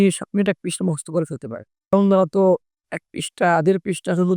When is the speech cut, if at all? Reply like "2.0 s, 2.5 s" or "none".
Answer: 1.9 s

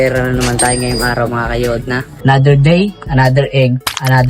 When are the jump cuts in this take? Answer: 2.1 s

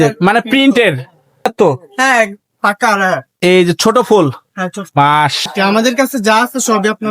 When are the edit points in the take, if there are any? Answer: 1.5 s, 5.4 s

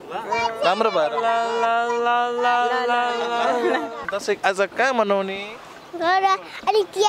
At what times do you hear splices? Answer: 3.9 s

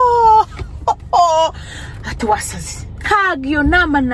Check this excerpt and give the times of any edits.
none

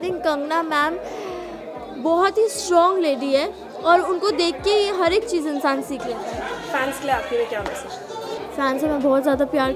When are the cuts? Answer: none

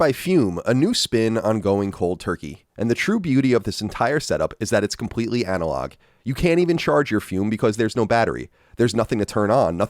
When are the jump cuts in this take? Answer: 2.6 s

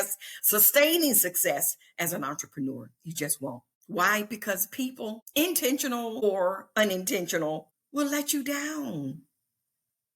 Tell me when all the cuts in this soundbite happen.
3.7 s, 5.2 s, 6.2 s, 7.7 s

